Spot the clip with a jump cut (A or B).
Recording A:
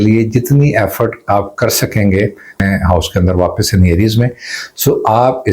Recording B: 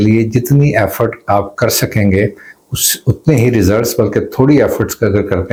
A